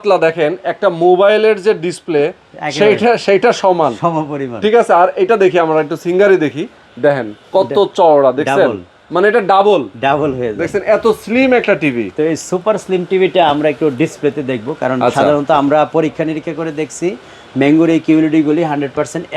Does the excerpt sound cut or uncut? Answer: uncut